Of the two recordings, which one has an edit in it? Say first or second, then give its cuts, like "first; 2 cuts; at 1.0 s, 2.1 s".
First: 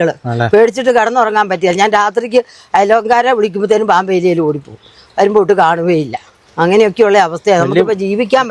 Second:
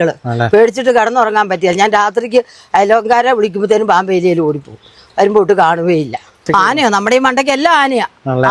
second; 1 cut; at 6.4 s